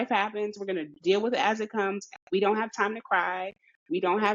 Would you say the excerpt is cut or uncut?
uncut